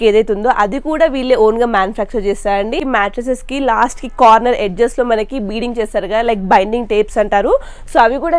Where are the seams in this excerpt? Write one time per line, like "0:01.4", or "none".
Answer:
0:02.8